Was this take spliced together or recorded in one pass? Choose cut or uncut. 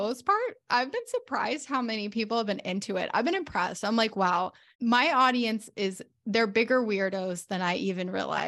cut